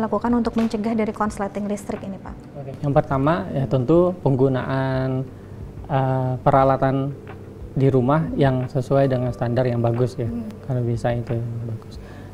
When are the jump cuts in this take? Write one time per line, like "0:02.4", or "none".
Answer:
none